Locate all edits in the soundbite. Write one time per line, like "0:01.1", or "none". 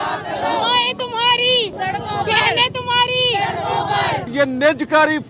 0:01.7
0:04.2